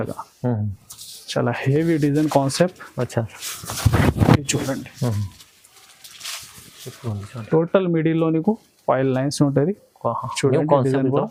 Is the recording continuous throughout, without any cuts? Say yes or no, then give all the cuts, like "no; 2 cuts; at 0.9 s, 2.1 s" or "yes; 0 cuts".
yes; 0 cuts